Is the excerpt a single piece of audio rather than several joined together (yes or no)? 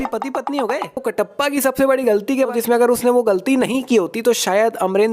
no